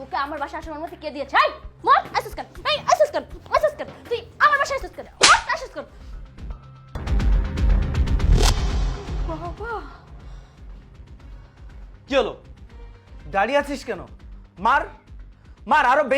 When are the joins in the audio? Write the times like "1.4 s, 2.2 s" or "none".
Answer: 1.7 s, 5.0 s, 7.0 s